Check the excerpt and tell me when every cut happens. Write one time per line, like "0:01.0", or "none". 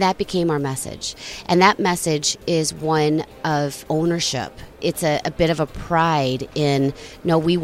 0:03.8
0:04.8